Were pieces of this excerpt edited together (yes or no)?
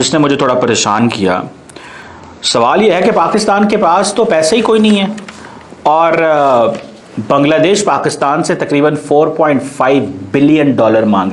no